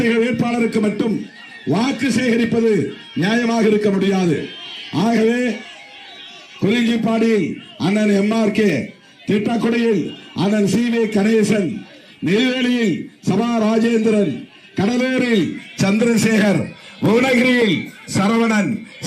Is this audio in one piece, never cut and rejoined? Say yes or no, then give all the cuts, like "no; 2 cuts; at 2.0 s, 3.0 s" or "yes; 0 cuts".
yes; 0 cuts